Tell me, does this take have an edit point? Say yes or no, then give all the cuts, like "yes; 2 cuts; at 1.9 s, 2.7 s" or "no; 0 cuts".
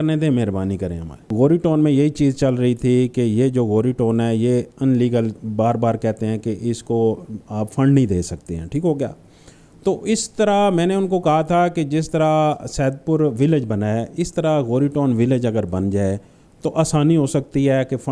yes; 1 cut; at 1.2 s